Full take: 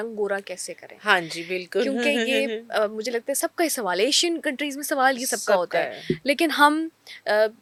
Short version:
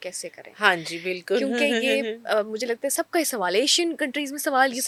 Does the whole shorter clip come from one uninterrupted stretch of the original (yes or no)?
yes